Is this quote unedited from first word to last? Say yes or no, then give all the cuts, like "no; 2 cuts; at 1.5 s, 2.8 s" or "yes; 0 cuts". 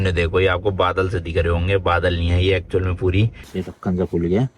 no; 1 cut; at 3.4 s